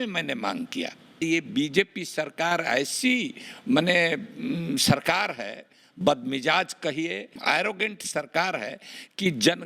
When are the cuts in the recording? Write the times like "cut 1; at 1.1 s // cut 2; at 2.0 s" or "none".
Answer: cut 1; at 1.1 s // cut 2; at 7.4 s